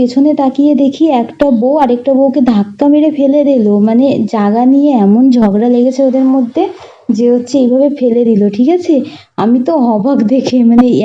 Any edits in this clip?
no; 0 cuts

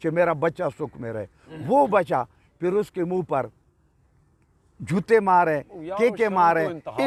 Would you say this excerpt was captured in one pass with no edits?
yes; 0 cuts

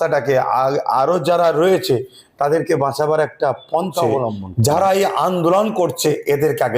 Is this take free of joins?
no; 1 cut; at 4.5 s

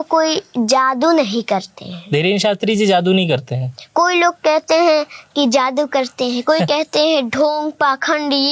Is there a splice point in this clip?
no; 0 cuts

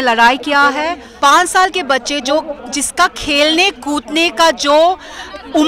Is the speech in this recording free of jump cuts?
no; 1 cut; at 1.0 s

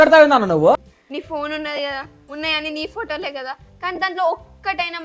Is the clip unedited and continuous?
no; 1 cut; at 0.9 s

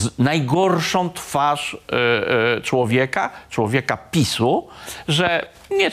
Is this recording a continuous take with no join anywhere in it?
yes; 0 cuts

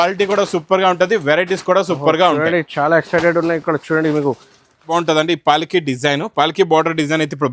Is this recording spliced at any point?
yes; 1 cut; at 4.9 s

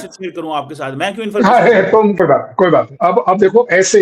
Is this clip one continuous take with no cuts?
no; 1 cut; at 2.2 s

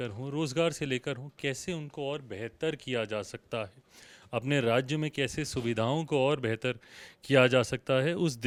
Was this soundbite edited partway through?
no; 0 cuts

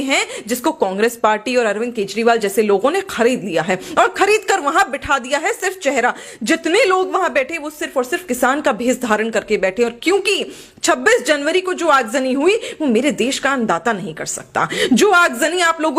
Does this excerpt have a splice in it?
no; 0 cuts

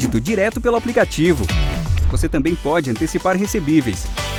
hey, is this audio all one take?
yes; 0 cuts

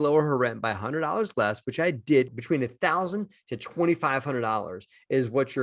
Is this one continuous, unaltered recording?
no; 1 cut; at 2.3 s

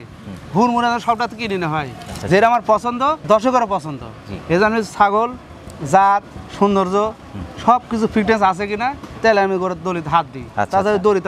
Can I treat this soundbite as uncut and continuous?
yes; 0 cuts

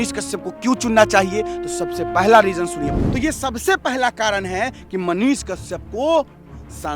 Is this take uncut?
no; 1 cut; at 2.8 s

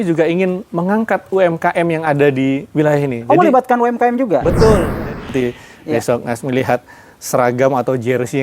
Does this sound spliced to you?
yes; 1 cut; at 5.2 s

